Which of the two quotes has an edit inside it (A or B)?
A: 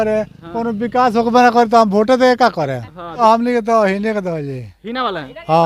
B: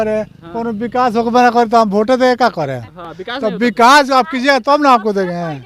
A